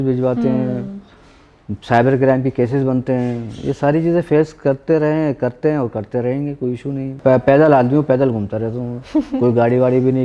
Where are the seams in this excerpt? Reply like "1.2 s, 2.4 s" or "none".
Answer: 7.2 s